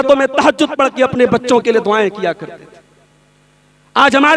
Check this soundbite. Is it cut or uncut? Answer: uncut